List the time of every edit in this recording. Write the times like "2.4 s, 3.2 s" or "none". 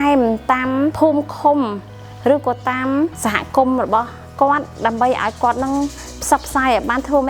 0.9 s, 3.2 s